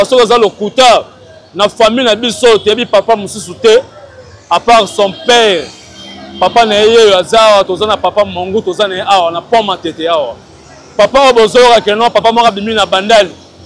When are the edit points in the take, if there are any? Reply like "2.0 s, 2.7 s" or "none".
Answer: none